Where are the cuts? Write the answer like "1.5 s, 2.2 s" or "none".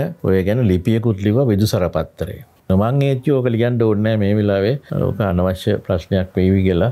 2.5 s